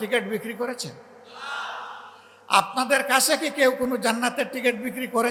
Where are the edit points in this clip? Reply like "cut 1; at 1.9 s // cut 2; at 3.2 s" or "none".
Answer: none